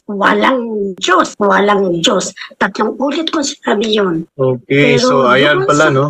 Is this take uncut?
yes; 0 cuts

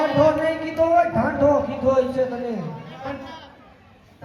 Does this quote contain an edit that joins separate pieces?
no; 0 cuts

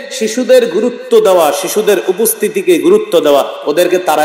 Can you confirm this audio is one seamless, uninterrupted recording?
yes; 0 cuts

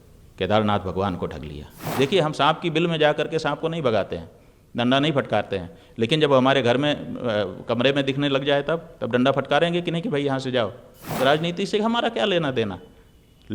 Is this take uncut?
no; 2 cuts; at 1.9 s, 11.1 s

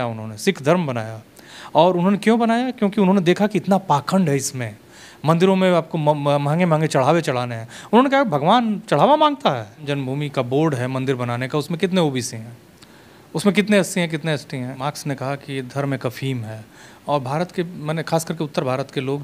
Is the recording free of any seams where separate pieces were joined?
no; 2 cuts; at 9.9 s, 14.8 s

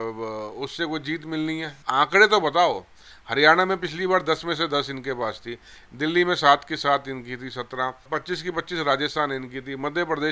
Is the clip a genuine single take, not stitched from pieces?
no; 2 cuts; at 1.7 s, 8.1 s

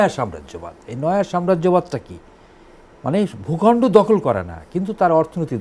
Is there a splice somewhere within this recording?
no; 0 cuts

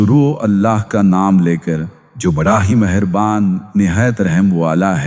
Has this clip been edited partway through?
no; 0 cuts

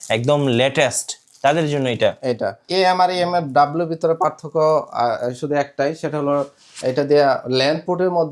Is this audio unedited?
no; 1 cut; at 2.7 s

